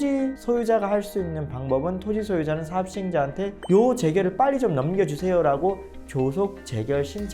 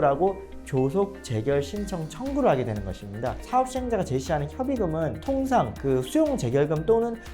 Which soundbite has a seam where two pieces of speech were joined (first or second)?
second